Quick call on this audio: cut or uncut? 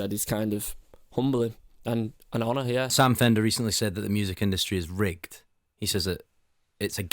cut